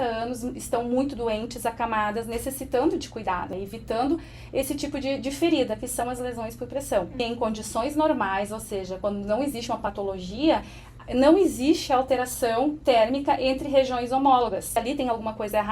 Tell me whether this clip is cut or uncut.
cut